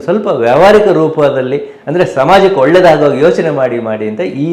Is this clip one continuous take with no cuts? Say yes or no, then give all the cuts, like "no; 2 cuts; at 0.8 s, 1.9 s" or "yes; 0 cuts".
yes; 0 cuts